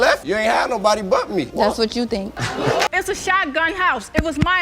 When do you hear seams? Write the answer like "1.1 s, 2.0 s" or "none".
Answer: 2.9 s